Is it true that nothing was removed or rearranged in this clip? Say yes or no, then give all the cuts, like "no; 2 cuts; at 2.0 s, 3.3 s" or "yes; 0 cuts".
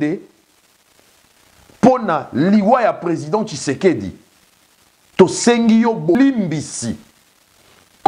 no; 1 cut; at 6.2 s